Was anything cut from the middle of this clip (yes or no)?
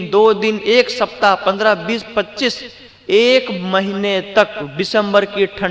no